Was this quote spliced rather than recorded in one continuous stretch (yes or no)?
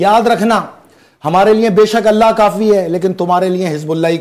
no